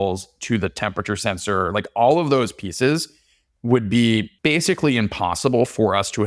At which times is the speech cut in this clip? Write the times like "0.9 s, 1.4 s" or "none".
4.3 s